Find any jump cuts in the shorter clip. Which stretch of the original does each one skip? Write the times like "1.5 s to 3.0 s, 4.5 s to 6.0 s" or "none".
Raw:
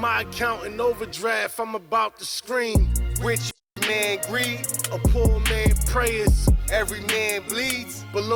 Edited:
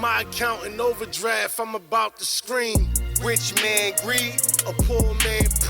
3.5 s to 3.7 s